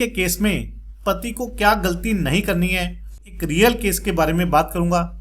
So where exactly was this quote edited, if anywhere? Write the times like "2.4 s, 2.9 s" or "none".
3.2 s